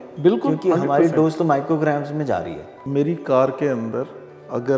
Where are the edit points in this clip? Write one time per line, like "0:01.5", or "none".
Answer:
0:02.9